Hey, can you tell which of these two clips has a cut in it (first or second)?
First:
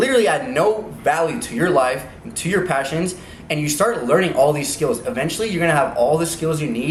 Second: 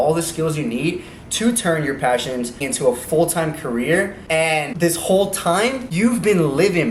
second